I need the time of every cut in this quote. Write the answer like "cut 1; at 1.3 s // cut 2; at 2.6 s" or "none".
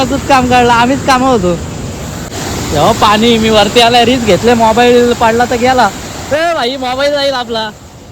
cut 1; at 2.3 s